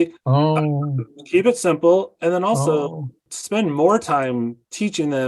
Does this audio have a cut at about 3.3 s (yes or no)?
yes